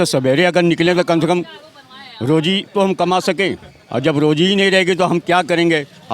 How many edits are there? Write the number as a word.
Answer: zero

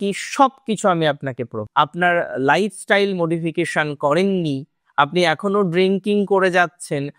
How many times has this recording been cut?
one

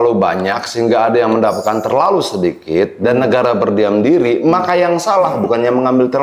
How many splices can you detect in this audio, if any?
zero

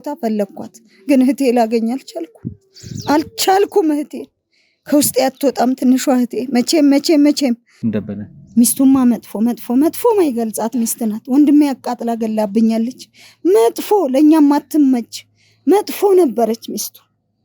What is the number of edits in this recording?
one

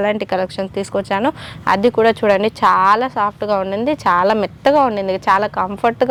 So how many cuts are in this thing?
zero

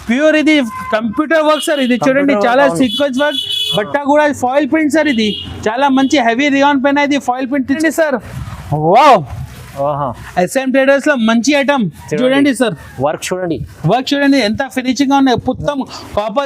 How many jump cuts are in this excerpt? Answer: one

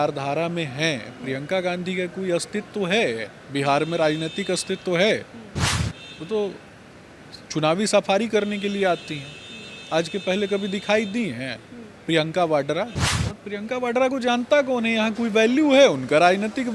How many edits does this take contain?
one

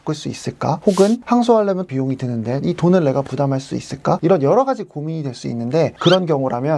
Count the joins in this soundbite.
one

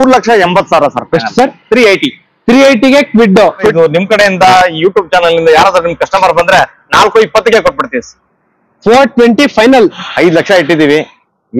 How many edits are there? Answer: two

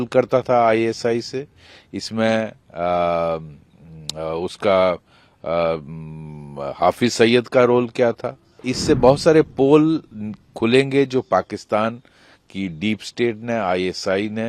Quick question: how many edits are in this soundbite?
one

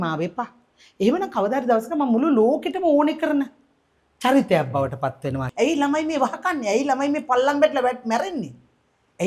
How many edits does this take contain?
one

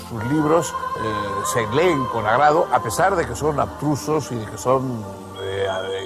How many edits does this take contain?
zero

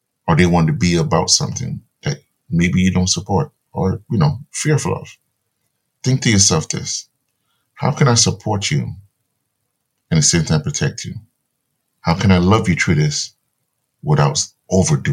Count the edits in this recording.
zero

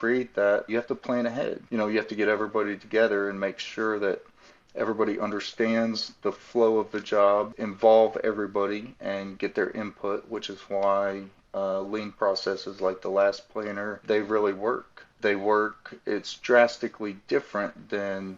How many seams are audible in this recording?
four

